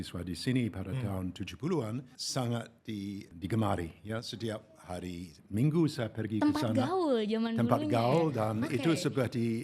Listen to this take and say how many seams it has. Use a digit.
2